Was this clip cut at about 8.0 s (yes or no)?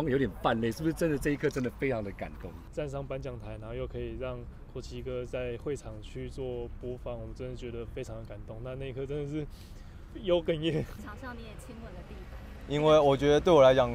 no